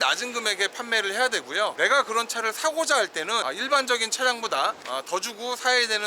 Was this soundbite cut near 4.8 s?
yes; 1 cut; at 4.8 s

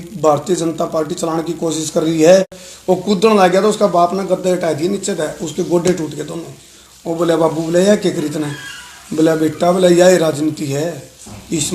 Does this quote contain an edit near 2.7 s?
yes; 1 cut; at 2.7 s

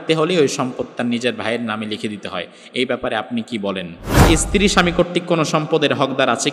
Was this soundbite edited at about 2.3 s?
no; 1 cut; at 4.2 s

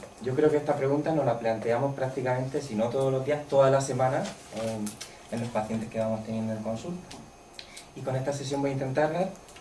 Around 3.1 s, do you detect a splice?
yes; 1 cut; at 3.1 s

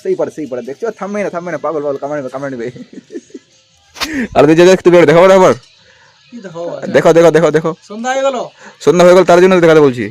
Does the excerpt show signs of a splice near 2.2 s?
no; 0 cuts

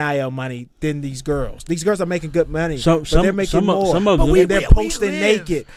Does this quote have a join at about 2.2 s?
no; 0 cuts

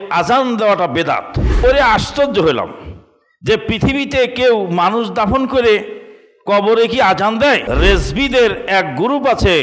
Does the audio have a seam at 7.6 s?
yes; 2 cuts; at 1.5 s, 7.6 s

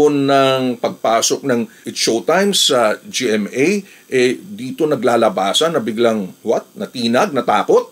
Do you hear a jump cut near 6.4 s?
no; 1 cut; at 1.8 s

